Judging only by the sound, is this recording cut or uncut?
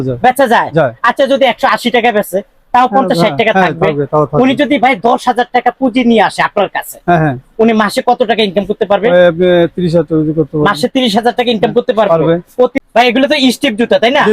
cut